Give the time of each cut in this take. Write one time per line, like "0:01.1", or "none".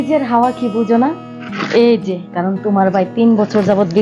0:02.2